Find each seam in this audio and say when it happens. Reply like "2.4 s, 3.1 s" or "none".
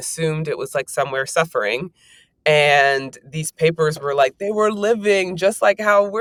none